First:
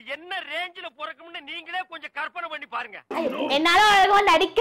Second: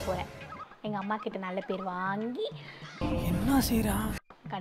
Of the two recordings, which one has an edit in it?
first; 1 cut; at 3.0 s

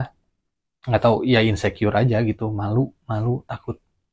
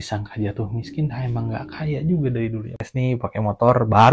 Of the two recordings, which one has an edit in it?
second; 1 cut; at 2.8 s

